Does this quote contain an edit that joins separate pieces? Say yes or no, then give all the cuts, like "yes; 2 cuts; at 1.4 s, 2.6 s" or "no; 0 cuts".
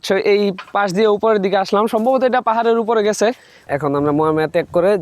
yes; 1 cut; at 3.7 s